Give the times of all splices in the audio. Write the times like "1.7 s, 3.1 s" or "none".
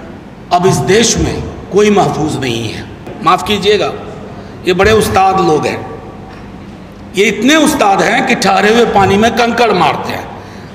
3.1 s